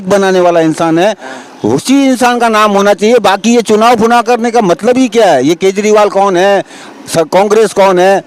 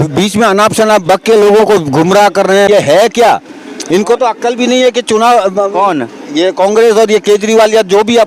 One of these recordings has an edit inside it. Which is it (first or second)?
second